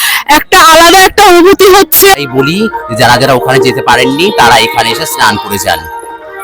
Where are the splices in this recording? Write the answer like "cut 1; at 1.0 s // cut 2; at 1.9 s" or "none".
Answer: cut 1; at 2.2 s